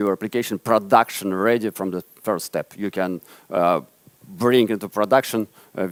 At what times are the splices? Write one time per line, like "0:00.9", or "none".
none